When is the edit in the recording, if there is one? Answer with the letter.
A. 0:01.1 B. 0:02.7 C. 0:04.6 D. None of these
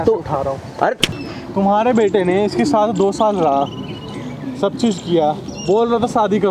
A